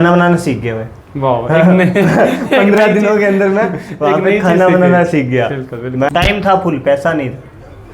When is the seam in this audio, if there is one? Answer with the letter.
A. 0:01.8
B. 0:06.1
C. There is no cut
B